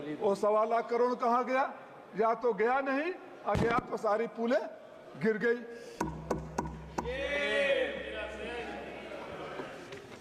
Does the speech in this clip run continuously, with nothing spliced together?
yes; 0 cuts

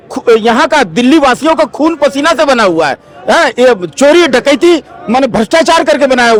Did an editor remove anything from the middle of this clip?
no; 0 cuts

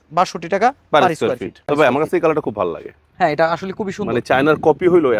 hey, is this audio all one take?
no; 1 cut; at 1.6 s

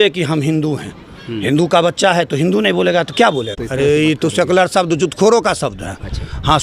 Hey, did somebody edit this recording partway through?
yes; 1 cut; at 3.6 s

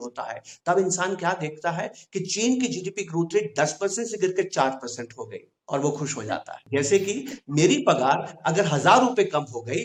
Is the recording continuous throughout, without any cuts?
yes; 0 cuts

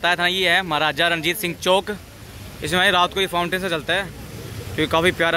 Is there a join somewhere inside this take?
no; 0 cuts

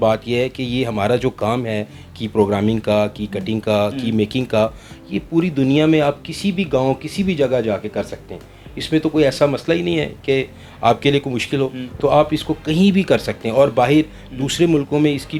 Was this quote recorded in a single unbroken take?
yes; 0 cuts

